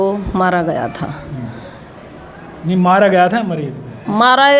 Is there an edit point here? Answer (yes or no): no